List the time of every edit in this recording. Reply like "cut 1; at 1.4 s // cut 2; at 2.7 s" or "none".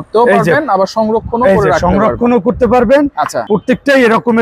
cut 1; at 3.4 s